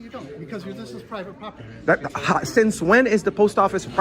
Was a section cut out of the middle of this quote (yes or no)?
no